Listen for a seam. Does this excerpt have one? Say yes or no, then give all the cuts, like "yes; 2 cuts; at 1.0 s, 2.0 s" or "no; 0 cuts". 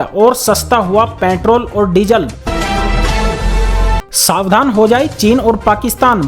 yes; 2 cuts; at 2.4 s, 4.0 s